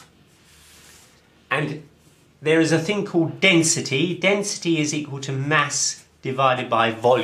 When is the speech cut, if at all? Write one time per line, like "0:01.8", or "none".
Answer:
0:02.5